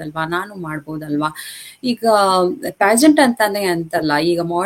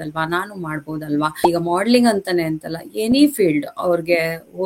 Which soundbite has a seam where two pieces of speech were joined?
second; 1 cut; at 1.4 s

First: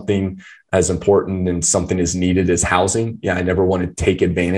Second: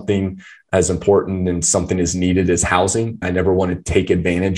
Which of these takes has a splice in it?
second; 1 cut; at 3.2 s

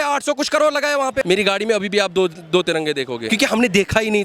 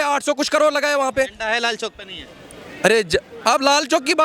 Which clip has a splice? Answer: first; 2 cuts; at 1.2 s, 3.2 s

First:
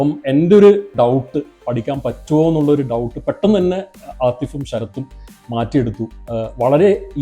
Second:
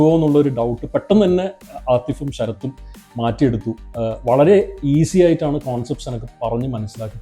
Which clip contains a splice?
first; 1 cut; at 0.9 s

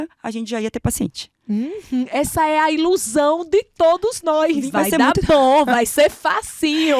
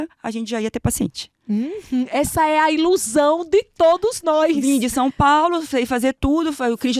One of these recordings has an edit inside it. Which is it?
first; 1 cut; at 4.6 s

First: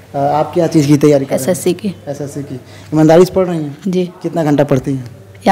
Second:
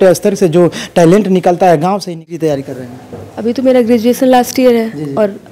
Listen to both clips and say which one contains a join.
second; 1 cut; at 2.1 s

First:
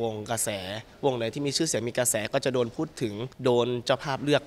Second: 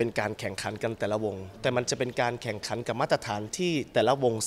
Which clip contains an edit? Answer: first; 1 cut; at 3.3 s

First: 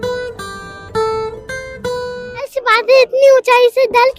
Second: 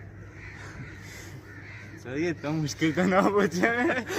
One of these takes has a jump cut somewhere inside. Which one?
first; 1 cut; at 2.5 s

